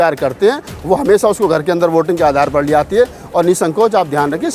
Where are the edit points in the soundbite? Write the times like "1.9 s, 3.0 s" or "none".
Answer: none